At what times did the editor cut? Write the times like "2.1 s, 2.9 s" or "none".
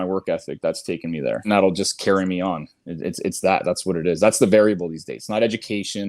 1.5 s

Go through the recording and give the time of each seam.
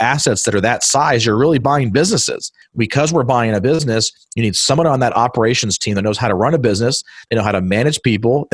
2.6 s, 3.8 s

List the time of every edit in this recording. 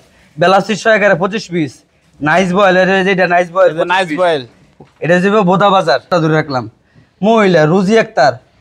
6.1 s

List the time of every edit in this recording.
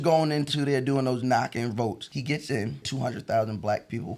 2.0 s, 2.8 s

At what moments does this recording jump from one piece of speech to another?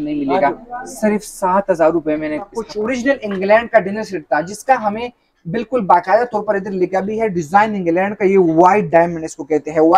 2.6 s

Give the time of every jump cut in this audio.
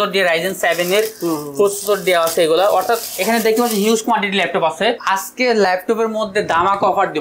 5.0 s

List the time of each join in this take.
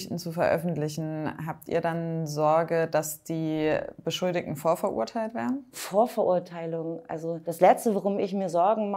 none

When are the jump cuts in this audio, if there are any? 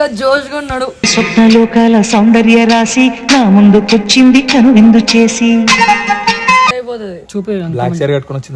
6.8 s

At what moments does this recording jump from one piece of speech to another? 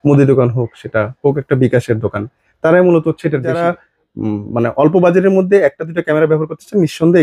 3.5 s

